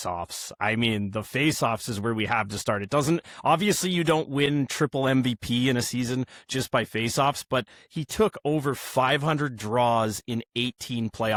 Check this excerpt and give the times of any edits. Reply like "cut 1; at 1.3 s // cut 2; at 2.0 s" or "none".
none